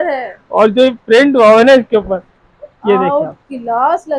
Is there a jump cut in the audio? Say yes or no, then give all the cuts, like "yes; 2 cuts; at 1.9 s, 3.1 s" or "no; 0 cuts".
no; 0 cuts